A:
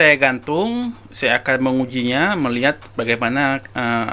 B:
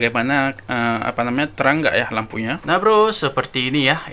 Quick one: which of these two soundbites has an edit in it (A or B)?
B